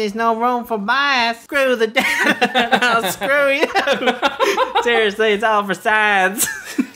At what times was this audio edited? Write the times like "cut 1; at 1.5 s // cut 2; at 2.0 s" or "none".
cut 1; at 1.4 s